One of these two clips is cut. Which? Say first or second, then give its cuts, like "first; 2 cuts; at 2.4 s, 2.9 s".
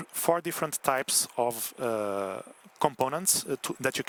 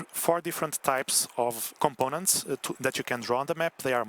second; 1 cut; at 1.7 s